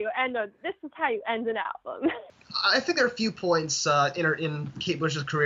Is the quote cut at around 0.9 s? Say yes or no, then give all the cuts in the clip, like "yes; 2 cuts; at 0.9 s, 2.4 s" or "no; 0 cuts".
no; 1 cut; at 2.2 s